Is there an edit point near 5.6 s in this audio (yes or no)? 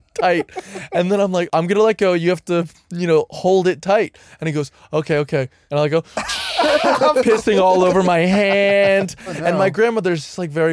yes